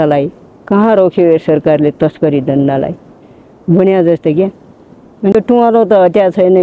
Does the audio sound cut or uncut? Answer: cut